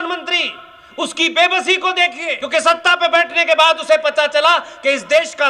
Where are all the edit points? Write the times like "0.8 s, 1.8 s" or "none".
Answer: 2.4 s

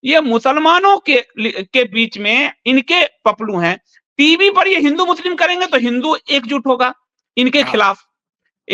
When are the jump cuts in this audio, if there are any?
none

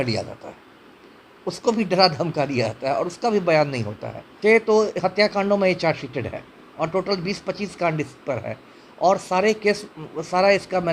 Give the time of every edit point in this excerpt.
4.2 s

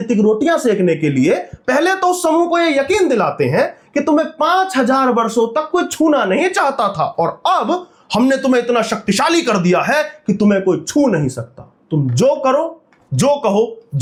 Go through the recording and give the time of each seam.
none

